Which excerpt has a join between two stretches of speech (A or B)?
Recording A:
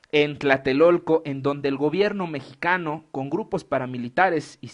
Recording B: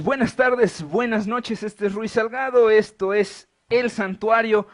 A